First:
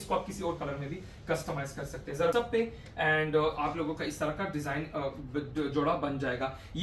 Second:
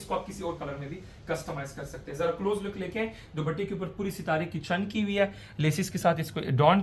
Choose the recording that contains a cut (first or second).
first